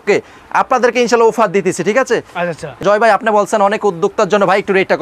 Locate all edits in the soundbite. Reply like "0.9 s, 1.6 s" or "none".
2.8 s